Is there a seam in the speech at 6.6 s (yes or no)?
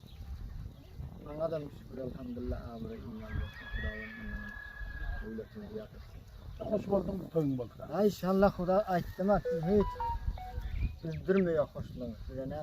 yes